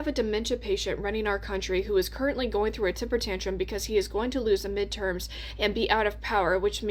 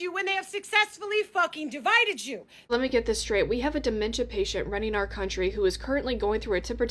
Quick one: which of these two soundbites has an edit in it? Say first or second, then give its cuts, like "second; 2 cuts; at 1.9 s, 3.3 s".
second; 1 cut; at 2.6 s